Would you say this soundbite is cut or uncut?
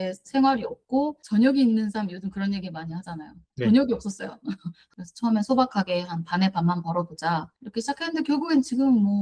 uncut